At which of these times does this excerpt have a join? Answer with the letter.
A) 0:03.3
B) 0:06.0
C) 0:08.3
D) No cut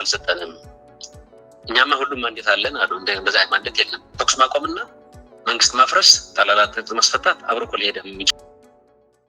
C